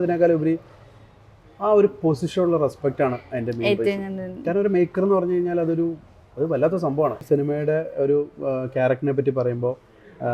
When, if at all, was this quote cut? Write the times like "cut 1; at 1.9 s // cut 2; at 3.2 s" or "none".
cut 1; at 7.2 s